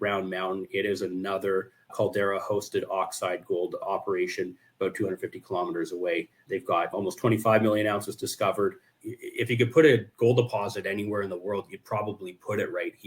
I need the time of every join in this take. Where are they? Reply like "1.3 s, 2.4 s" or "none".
8.9 s